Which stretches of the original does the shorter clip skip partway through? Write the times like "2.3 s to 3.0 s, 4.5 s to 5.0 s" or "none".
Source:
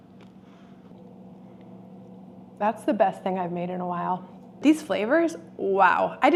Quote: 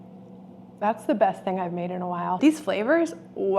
4.2 s to 4.6 s